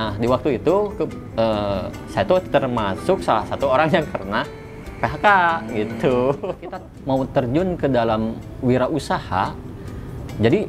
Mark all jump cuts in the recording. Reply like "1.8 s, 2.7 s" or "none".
6.9 s